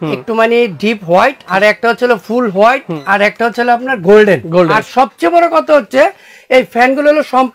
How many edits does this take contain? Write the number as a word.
three